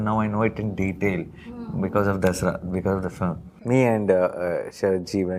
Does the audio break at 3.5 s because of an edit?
yes; 1 cut; at 3.5 s

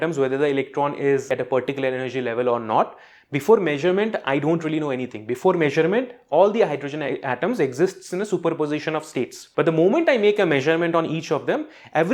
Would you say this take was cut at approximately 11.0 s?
no; 2 cuts; at 1.3 s, 9.4 s

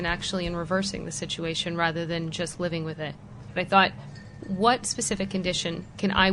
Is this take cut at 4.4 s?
yes; 2 cuts; at 3.5 s, 4.4 s

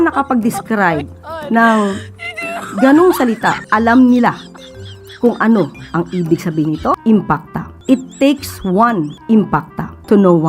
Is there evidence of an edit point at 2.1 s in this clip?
no; 3 cuts; at 3.6 s, 7.2 s, 9.4 s

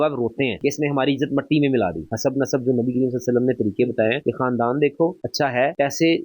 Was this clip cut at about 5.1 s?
no; 1 cut; at 2.1 s

